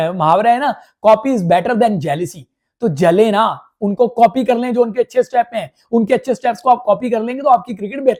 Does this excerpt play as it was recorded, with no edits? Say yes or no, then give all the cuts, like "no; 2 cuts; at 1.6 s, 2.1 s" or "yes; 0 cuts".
yes; 0 cuts